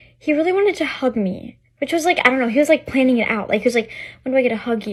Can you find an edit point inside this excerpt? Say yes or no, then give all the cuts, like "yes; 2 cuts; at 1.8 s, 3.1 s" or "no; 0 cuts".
no; 0 cuts